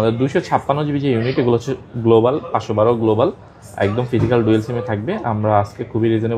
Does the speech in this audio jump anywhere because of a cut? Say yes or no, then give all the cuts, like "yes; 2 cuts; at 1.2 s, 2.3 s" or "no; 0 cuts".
no; 0 cuts